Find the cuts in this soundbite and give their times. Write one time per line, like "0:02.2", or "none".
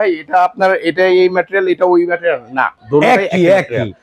0:02.7